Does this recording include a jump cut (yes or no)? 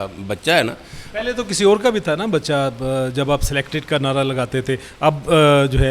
no